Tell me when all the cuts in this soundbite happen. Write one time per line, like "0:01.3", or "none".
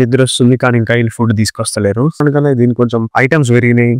0:02.2

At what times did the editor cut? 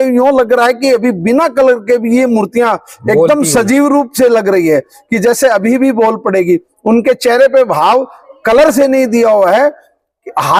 none

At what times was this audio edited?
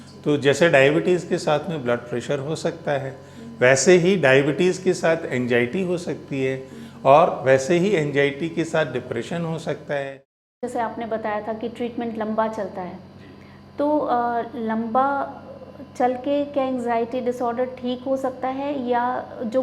0:10.1

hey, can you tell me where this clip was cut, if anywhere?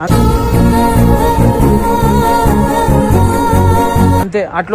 none

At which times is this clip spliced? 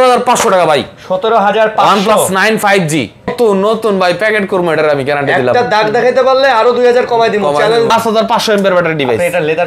0:03.3
0:07.9

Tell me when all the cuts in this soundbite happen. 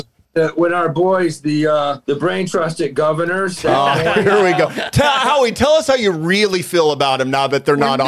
0:02.0

